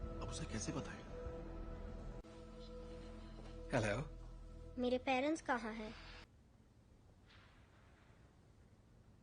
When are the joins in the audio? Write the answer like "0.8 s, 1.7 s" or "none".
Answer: 6.3 s